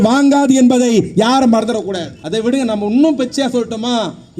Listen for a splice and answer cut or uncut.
cut